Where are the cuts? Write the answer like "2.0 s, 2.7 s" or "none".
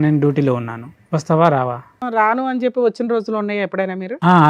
2.0 s